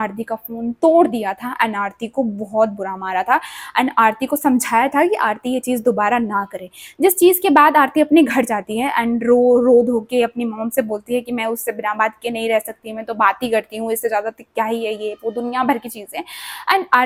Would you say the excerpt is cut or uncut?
uncut